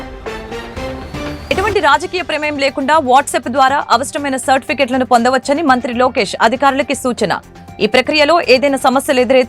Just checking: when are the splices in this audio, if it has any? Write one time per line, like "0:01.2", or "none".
0:01.4